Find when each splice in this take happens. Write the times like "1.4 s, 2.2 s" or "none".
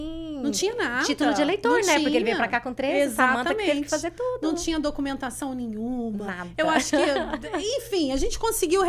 none